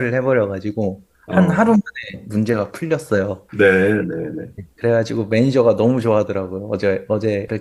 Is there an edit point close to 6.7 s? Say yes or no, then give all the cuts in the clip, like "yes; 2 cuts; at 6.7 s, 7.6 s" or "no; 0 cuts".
no; 0 cuts